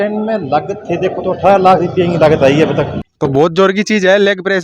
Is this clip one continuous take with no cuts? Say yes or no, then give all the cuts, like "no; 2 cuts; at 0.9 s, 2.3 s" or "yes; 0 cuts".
no; 1 cut; at 3.0 s